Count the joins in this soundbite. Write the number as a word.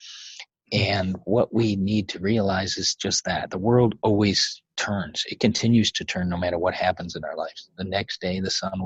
zero